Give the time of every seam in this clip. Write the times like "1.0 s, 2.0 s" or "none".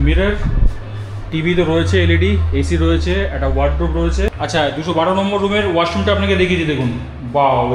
4.3 s